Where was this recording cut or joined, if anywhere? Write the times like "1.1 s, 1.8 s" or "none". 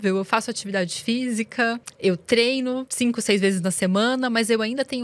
1.9 s, 2.9 s